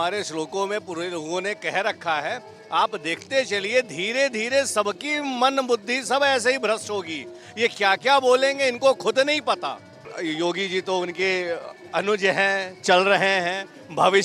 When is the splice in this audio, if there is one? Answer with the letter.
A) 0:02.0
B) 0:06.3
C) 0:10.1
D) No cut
C